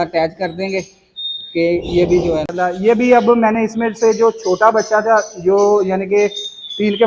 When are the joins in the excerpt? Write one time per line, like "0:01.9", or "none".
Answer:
0:02.5